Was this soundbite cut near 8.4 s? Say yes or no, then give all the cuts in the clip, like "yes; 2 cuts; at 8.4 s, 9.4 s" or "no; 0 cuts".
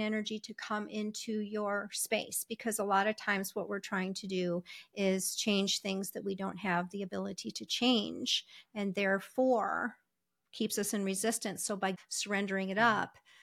no; 1 cut; at 12.0 s